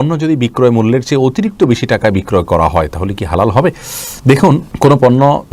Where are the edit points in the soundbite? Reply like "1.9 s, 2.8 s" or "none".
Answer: none